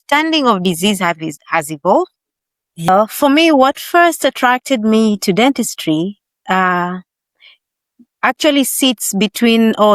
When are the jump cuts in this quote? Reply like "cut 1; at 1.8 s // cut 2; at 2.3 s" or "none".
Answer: cut 1; at 2.9 s